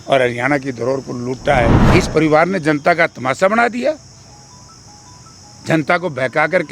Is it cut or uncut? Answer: cut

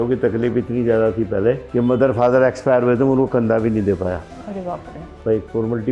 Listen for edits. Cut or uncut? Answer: uncut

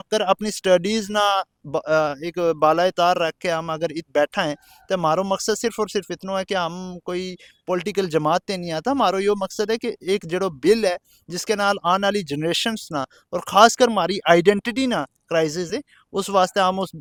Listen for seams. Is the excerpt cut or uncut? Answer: uncut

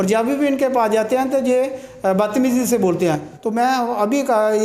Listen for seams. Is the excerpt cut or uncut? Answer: cut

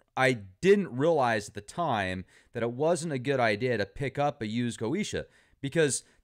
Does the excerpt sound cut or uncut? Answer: uncut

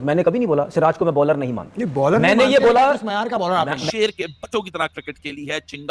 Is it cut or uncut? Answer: cut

